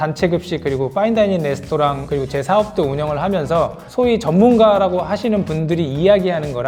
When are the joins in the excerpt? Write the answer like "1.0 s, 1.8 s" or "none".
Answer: 2.0 s, 3.8 s